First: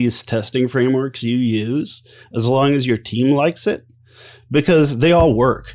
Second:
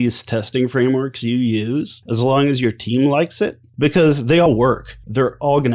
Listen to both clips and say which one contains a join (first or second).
second